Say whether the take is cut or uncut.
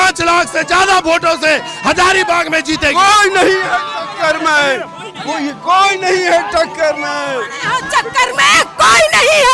uncut